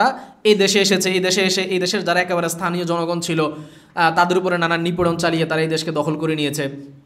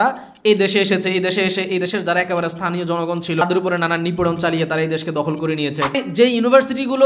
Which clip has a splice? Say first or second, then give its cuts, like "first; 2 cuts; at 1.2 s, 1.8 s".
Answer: second; 2 cuts; at 3.4 s, 5.9 s